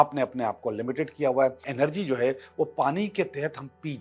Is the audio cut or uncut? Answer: cut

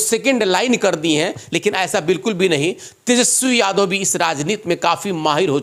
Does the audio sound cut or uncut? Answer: uncut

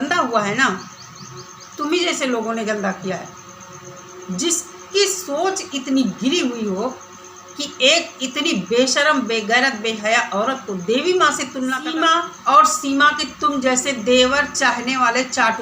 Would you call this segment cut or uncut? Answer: cut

